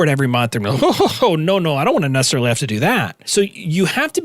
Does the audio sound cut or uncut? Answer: cut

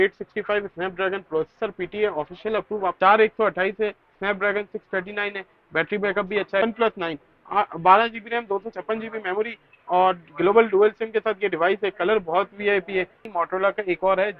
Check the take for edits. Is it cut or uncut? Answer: cut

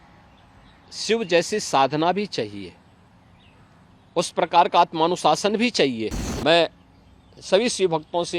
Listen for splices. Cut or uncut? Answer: cut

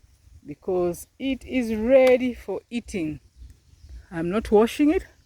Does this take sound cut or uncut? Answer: uncut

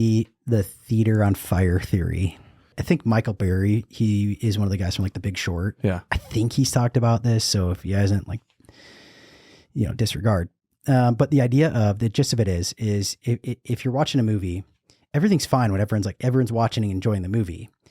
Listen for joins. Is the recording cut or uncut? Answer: cut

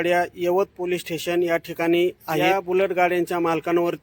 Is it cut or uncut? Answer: cut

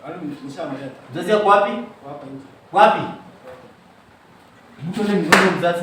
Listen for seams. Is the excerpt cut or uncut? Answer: uncut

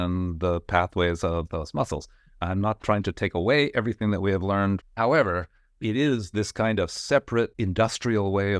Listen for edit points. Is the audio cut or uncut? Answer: cut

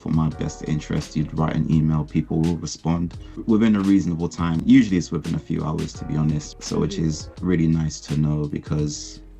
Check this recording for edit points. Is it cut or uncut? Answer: cut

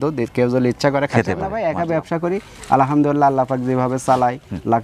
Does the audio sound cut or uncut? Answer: cut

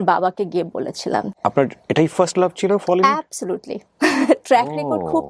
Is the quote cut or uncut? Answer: cut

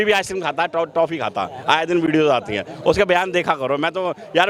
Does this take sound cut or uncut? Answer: uncut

